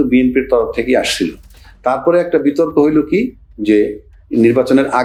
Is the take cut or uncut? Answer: uncut